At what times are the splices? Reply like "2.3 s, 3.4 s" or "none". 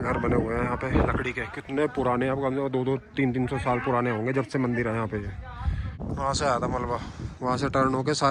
6.0 s

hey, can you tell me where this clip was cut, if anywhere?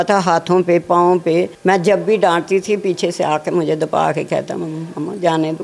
1.5 s

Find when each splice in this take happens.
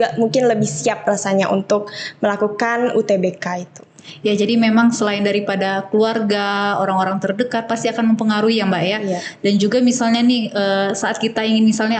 none

